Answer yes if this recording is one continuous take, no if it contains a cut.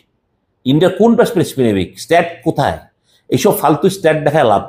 yes